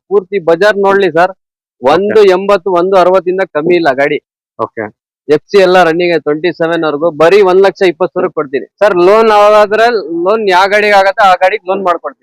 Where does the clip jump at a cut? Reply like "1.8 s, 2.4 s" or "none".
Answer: 8.6 s